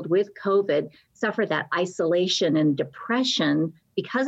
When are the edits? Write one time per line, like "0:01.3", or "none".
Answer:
none